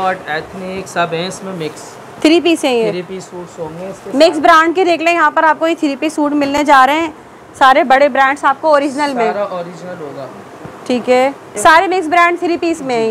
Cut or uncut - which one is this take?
uncut